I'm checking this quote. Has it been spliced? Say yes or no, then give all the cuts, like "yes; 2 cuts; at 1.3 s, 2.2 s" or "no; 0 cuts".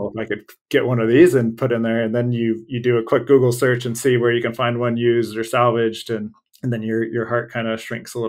no; 0 cuts